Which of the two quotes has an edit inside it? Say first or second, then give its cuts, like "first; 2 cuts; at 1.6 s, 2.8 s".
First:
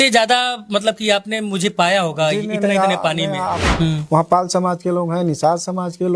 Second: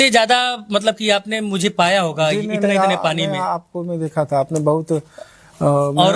first; 1 cut; at 3.7 s